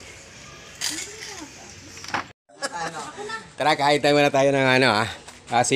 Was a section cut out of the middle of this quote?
yes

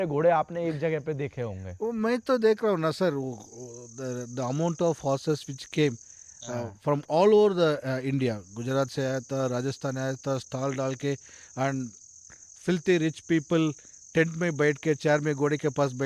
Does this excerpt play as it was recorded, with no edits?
yes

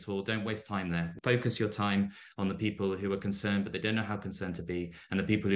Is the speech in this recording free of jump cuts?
no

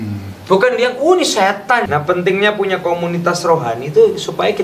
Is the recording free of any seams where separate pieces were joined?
no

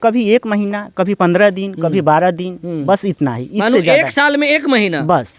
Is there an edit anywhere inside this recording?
no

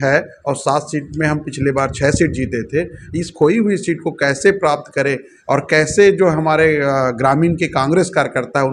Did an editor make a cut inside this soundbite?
no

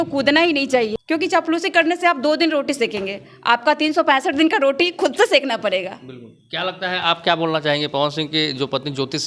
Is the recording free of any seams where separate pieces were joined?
no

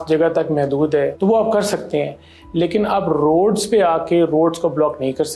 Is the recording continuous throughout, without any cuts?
no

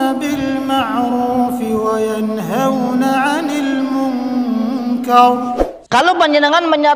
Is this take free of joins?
no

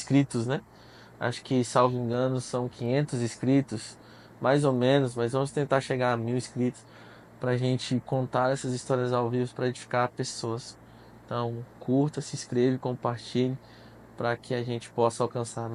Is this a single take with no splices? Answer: yes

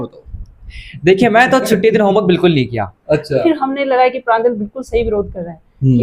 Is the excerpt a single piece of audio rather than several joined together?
no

